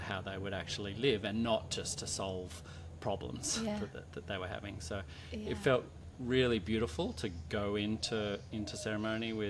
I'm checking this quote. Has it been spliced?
no; 0 cuts

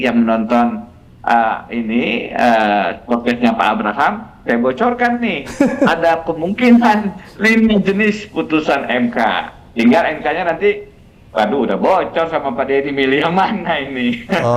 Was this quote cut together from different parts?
no; 0 cuts

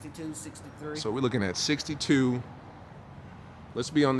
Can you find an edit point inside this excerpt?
no; 0 cuts

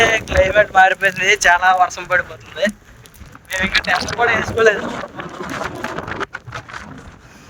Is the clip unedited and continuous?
yes; 0 cuts

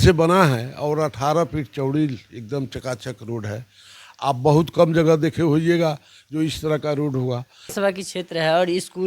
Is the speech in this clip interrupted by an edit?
yes; 1 cut; at 7.7 s

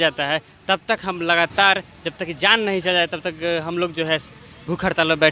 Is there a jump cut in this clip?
no; 0 cuts

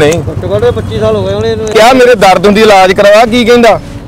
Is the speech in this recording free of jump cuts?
no; 1 cut; at 1.7 s

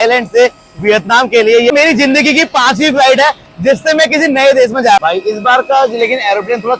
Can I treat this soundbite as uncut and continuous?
no; 2 cuts; at 1.7 s, 5.0 s

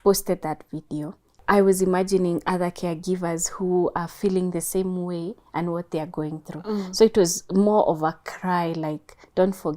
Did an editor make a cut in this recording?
yes; 1 cut; at 1.3 s

